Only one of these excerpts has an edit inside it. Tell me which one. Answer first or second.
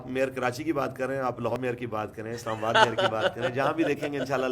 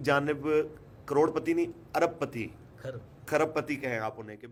first